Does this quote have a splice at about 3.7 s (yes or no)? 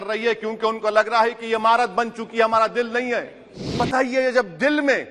yes